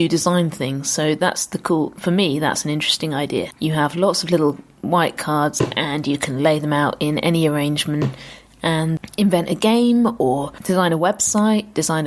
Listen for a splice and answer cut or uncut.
cut